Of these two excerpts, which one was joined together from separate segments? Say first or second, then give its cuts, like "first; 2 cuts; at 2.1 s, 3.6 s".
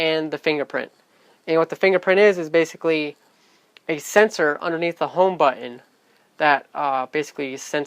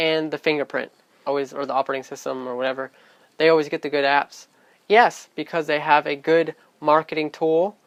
first; 1 cut; at 1.2 s